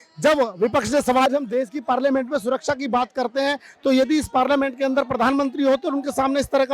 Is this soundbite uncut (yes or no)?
no